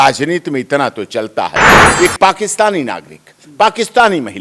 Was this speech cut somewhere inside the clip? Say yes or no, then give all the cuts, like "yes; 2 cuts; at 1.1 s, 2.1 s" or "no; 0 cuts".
yes; 1 cut; at 1.7 s